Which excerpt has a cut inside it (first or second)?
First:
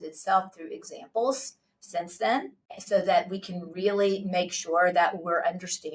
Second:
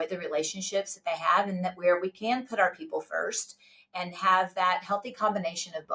first